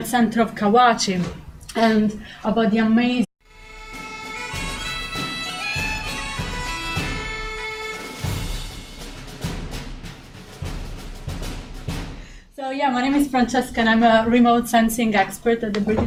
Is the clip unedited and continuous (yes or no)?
yes